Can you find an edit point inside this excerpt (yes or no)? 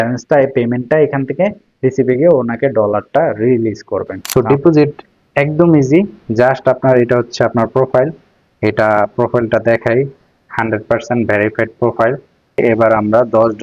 yes